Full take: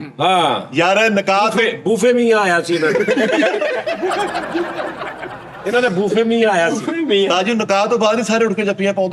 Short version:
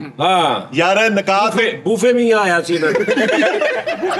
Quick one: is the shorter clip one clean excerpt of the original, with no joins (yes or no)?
yes